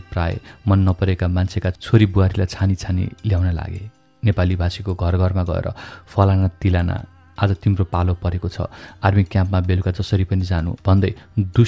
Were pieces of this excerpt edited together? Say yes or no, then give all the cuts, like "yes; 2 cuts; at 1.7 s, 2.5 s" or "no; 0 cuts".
no; 0 cuts